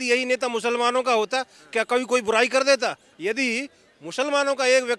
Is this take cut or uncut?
cut